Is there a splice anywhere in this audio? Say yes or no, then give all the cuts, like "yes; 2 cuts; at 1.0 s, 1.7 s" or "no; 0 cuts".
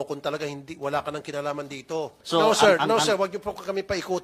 yes; 1 cut; at 2.2 s